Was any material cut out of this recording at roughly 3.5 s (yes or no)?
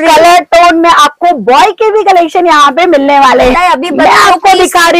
yes